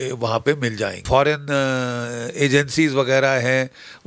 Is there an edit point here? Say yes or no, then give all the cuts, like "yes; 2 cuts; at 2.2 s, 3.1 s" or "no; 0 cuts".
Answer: yes; 1 cut; at 1.1 s